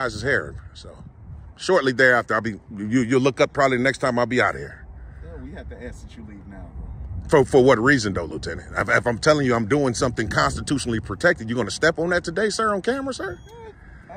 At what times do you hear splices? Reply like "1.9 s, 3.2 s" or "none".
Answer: none